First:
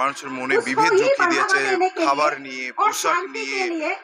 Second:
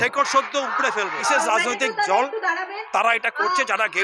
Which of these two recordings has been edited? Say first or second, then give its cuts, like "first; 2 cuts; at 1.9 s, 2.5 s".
second; 1 cut; at 1.2 s